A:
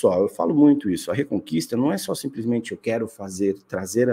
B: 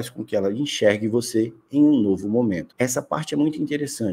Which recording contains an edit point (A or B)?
B